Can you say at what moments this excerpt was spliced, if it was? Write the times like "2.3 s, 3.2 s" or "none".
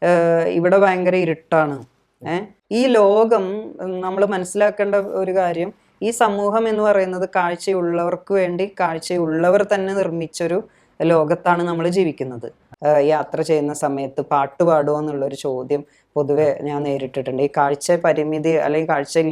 2.5 s, 12.7 s